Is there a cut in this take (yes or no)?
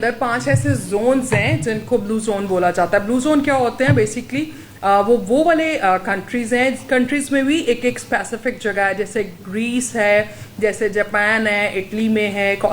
no